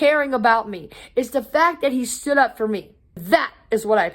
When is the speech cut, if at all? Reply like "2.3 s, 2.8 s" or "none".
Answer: 3.2 s